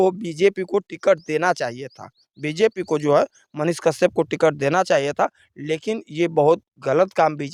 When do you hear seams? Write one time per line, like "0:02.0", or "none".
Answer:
none